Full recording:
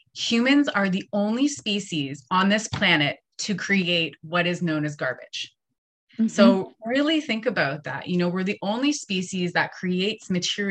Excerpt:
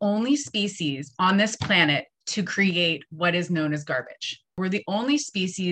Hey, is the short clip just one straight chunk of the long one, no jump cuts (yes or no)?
no